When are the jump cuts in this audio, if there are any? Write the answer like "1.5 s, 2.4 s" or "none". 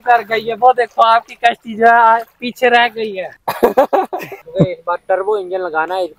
4.5 s